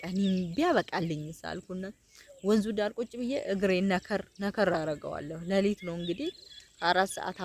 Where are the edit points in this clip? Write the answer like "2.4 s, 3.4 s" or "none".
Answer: none